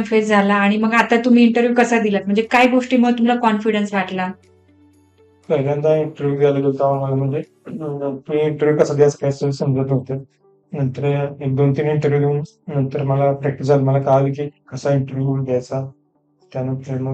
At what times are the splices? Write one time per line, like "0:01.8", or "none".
none